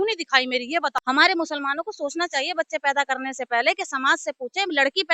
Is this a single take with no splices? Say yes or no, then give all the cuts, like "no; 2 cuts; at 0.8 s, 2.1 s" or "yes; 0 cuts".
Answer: no; 1 cut; at 0.9 s